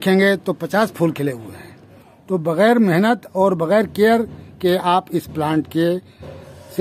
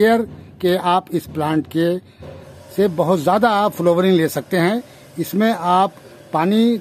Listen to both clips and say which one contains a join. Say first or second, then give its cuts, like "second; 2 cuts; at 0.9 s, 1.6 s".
first; 1 cut; at 2.3 s